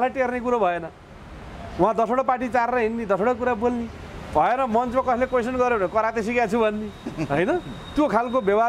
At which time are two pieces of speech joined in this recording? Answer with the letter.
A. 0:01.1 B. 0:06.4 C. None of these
C